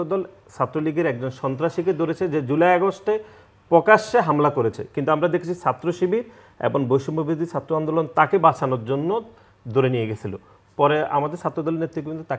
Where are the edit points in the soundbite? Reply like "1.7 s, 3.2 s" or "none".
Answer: none